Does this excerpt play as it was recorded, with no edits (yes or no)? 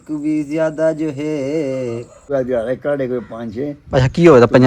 no